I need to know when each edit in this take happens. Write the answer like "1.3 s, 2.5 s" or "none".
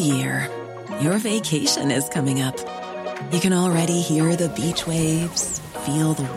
none